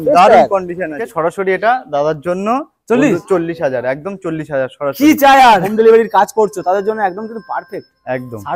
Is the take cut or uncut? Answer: cut